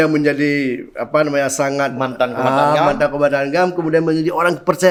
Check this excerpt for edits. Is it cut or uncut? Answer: uncut